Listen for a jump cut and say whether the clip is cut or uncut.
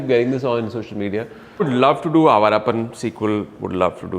cut